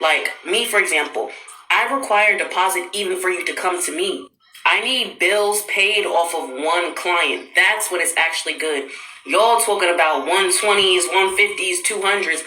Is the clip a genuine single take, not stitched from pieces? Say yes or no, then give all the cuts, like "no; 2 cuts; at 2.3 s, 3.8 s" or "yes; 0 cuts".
no; 2 cuts; at 5.0 s, 9.7 s